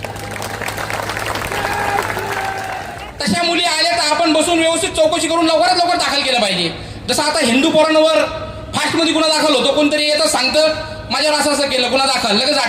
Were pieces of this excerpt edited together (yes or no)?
yes